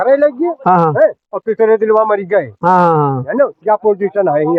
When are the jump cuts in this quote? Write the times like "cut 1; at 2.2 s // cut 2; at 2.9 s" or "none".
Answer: none